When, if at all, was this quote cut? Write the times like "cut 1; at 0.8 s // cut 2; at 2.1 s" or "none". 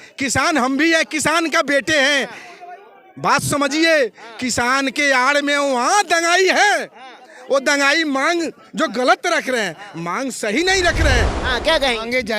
cut 1; at 11.4 s